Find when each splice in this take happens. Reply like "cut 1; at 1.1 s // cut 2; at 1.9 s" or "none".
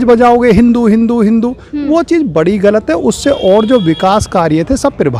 none